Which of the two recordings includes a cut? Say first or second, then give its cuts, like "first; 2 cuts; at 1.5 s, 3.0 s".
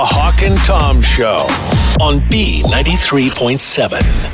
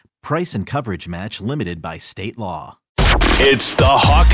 second; 1 cut; at 2.8 s